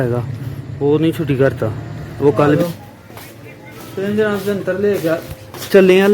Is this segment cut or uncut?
cut